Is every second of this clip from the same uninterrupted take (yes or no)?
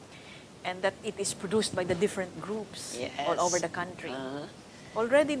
no